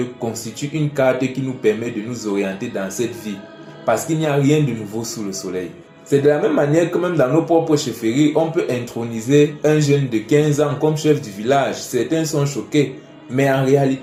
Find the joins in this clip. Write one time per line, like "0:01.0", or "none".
none